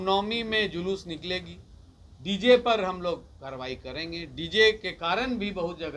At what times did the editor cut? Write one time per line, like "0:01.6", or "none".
none